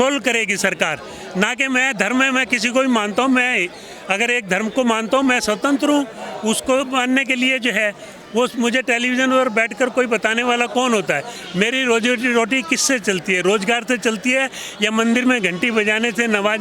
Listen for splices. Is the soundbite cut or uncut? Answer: cut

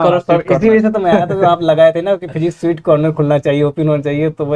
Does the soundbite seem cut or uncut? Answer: uncut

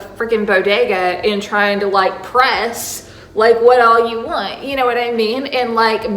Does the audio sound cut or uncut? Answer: uncut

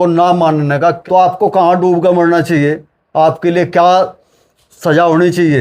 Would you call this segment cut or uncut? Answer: cut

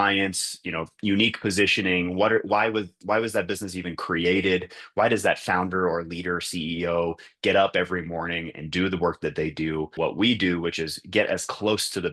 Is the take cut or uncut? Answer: cut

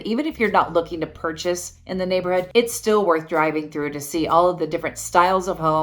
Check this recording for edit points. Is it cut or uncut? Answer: cut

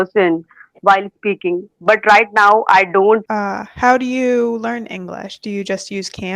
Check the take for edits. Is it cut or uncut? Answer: cut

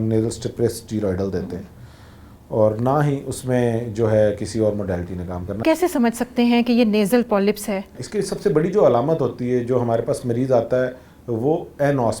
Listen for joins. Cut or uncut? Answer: cut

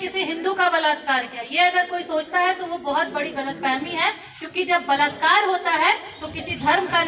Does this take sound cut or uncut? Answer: uncut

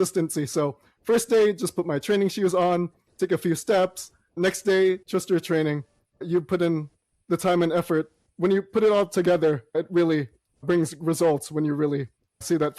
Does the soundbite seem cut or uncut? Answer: cut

